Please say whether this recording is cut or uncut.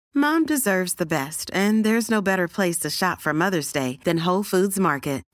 uncut